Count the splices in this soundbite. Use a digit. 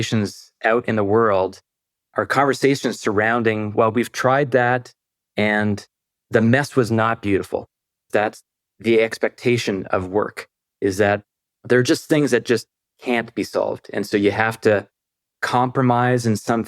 2